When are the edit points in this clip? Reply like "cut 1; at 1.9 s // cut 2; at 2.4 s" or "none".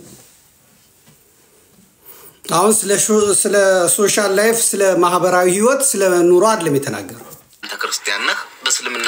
cut 1; at 7.7 s